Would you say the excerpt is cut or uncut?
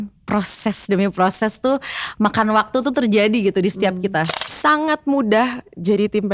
cut